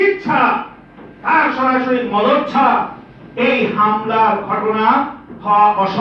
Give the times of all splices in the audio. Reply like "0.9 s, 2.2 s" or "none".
none